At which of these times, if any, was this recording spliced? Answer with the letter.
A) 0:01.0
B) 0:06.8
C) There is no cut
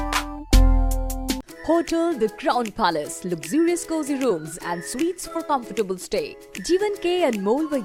C